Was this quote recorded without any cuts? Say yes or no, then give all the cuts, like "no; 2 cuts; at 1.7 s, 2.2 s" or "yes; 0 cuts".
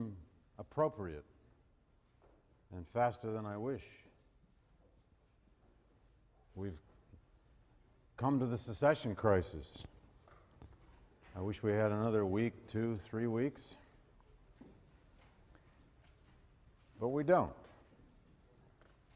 yes; 0 cuts